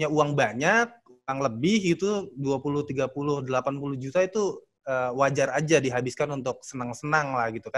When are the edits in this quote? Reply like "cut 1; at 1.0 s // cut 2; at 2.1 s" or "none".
none